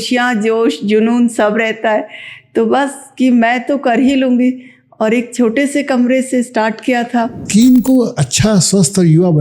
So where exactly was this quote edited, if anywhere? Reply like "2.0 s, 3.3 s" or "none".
7.4 s